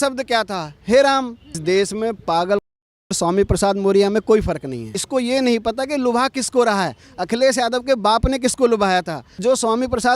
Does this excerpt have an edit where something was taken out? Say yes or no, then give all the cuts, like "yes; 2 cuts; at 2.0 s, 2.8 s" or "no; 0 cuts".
yes; 3 cuts; at 1.6 s, 5.0 s, 9.3 s